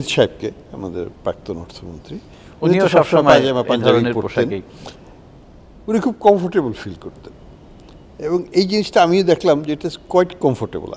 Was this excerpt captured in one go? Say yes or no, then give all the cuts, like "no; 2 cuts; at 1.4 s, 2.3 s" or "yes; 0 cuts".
yes; 0 cuts